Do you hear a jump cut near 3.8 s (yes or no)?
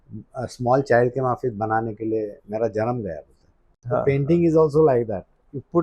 yes